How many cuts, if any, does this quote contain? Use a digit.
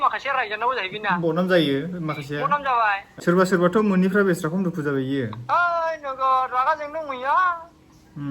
1